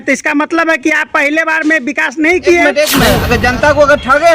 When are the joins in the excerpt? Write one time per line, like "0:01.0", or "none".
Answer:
0:02.6